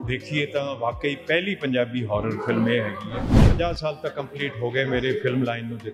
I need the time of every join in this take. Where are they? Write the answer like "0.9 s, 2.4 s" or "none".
3.4 s